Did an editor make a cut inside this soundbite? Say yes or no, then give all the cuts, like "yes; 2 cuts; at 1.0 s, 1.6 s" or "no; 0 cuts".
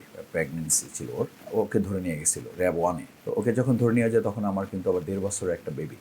yes; 2 cuts; at 1.4 s, 3.1 s